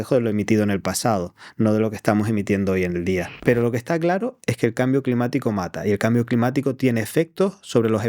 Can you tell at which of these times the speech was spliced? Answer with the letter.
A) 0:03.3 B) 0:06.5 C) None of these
A